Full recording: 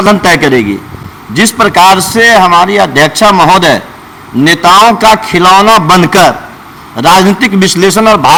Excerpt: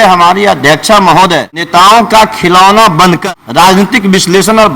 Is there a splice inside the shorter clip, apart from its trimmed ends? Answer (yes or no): yes